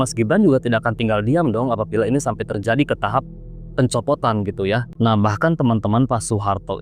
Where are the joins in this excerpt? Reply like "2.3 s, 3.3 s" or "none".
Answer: 4.9 s